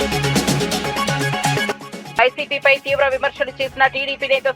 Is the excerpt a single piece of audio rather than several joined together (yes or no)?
yes